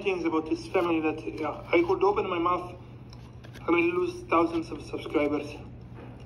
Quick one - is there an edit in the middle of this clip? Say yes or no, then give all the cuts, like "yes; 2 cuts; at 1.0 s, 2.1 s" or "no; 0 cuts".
no; 0 cuts